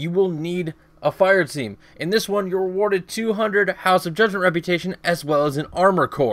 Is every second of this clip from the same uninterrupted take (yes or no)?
yes